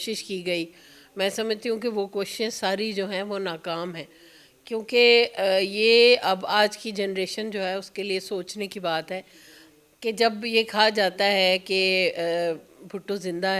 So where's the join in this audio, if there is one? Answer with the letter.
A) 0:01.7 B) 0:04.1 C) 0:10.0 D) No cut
D